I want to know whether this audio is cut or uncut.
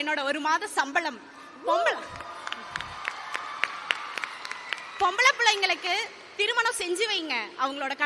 uncut